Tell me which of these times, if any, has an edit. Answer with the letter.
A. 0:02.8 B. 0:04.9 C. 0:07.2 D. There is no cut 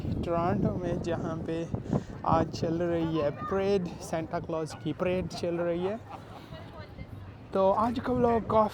B